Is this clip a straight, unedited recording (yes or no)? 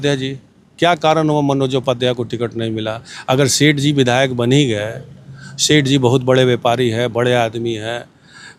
yes